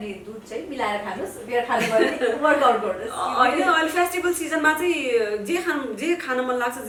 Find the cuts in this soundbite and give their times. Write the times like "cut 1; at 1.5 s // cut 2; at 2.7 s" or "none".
none